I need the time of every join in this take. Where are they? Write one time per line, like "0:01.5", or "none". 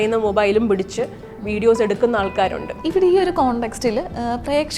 0:02.7

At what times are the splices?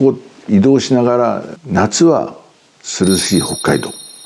0:01.5

